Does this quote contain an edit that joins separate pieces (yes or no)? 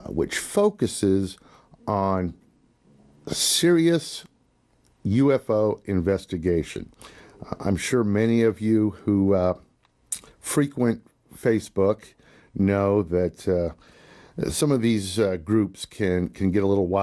yes